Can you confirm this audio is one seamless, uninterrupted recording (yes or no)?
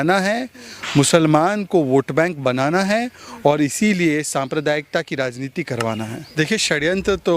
no